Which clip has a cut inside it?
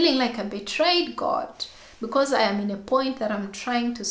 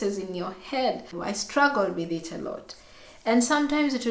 second; 1 cut; at 1.1 s

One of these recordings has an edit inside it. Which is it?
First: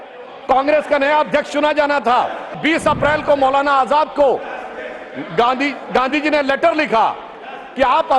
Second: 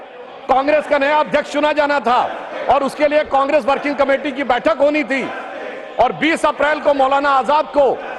first; 1 cut; at 2.6 s

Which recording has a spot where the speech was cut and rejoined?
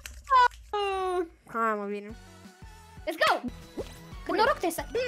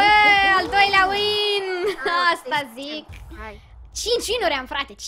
first; 1 cut; at 3.6 s

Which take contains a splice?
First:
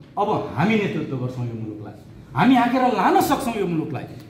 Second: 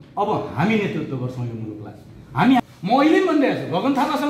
second; 1 cut; at 2.6 s

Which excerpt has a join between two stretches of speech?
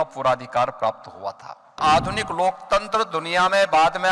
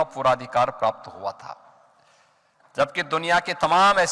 first; 1 cut; at 1.8 s

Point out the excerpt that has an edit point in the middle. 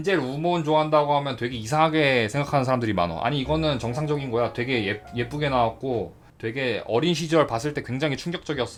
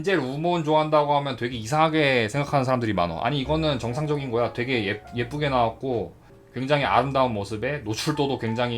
second; 1 cut; at 6.2 s

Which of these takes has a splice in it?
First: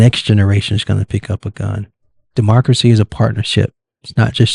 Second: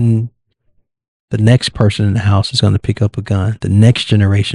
first; 1 cut; at 2.3 s

